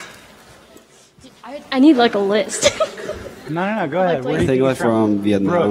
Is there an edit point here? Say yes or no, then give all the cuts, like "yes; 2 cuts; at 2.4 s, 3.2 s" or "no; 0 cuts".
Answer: no; 0 cuts